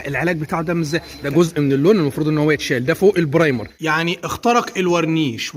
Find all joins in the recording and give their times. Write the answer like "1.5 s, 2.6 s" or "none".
1.2 s, 3.7 s